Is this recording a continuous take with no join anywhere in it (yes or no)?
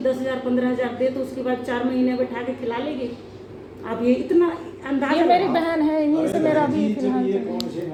yes